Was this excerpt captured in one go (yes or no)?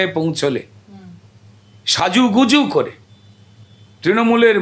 yes